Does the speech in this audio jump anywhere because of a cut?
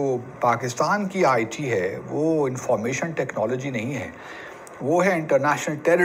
no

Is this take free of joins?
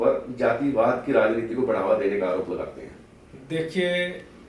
no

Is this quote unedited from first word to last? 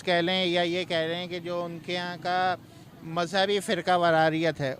no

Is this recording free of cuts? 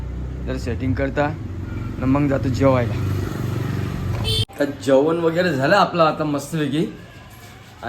no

